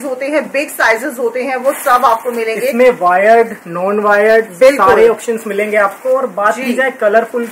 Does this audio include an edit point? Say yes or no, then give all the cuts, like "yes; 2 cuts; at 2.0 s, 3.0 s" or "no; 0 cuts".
no; 0 cuts